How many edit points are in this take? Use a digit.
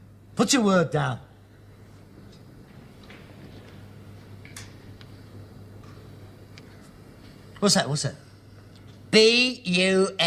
0